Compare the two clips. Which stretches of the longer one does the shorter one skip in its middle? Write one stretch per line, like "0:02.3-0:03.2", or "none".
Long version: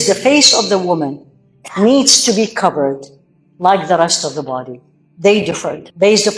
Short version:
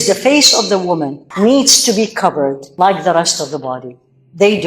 0:01.2-0:01.6
0:03.0-0:03.5